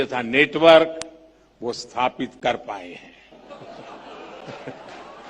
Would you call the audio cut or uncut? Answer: cut